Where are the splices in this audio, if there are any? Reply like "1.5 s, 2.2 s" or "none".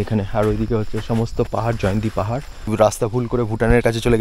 2.7 s